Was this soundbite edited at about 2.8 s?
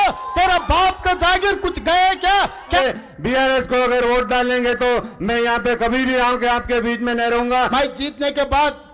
yes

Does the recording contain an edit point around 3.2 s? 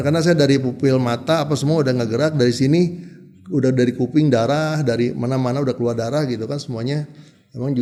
no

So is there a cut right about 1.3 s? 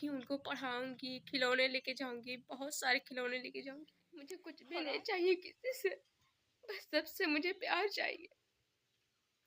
no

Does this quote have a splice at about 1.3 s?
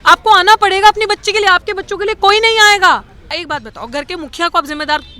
no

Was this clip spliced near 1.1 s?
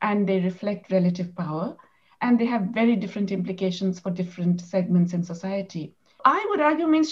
no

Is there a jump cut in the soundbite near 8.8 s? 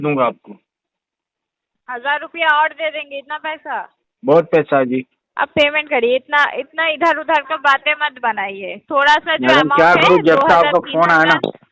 no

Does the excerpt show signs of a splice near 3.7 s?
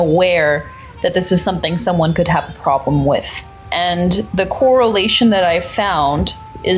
yes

